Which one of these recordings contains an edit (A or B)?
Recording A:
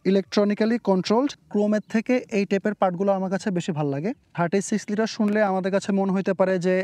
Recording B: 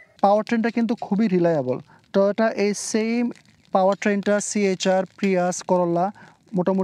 A